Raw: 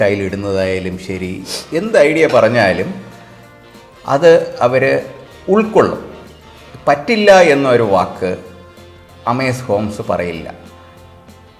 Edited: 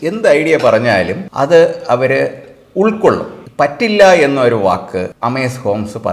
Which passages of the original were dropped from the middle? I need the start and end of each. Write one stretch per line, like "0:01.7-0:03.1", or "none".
0:02.9-0:03.9
0:06.1-0:06.6
0:08.4-0:09.2